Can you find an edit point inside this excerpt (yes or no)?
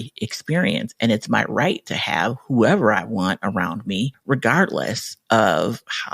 yes